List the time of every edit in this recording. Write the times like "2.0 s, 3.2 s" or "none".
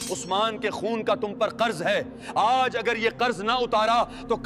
none